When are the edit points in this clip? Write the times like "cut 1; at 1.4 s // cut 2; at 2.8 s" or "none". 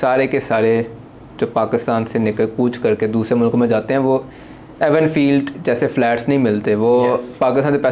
none